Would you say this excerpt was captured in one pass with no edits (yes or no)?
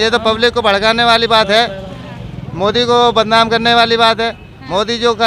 yes